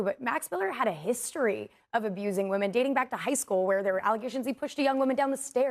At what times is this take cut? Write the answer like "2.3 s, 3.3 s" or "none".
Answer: none